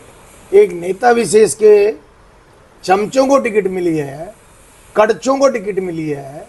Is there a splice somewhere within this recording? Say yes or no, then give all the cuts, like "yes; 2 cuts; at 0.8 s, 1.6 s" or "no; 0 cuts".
no; 0 cuts